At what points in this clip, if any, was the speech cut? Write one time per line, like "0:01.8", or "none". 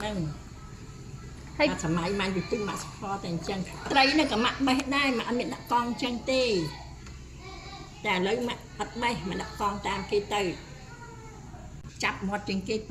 0:11.5